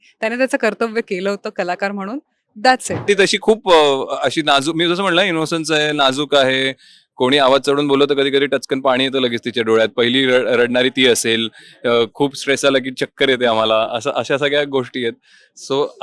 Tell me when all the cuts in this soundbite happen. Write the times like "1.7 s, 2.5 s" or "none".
3.0 s